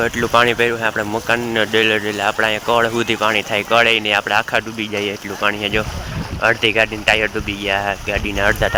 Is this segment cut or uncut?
uncut